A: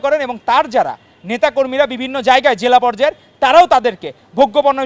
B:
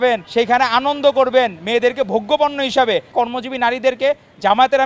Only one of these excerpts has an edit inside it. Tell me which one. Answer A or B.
B